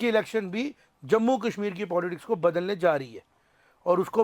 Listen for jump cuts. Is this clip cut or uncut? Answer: uncut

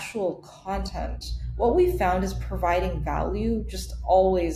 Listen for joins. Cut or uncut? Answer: uncut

